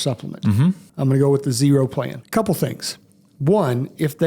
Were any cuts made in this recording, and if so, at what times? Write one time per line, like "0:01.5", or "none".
0:00.9
0:02.2